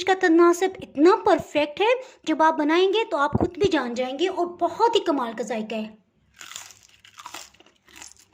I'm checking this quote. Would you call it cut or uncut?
uncut